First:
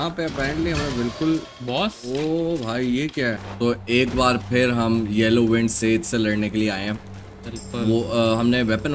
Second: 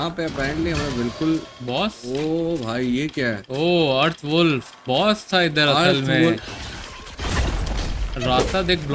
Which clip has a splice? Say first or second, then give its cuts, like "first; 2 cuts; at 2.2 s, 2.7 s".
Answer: first; 1 cut; at 3.4 s